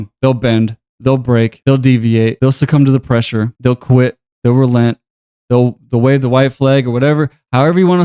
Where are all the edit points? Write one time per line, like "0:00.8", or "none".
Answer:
0:01.6
0:02.4
0:03.5